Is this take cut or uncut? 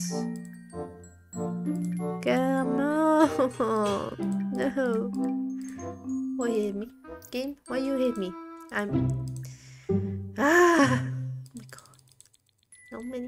uncut